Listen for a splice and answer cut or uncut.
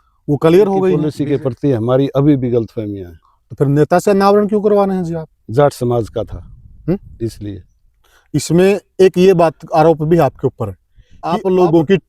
uncut